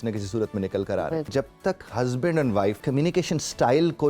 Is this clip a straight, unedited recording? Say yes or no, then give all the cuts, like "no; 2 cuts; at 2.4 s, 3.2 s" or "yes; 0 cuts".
no; 2 cuts; at 1.3 s, 2.8 s